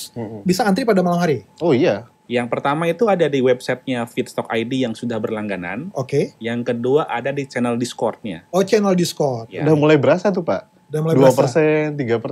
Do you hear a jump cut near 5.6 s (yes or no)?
no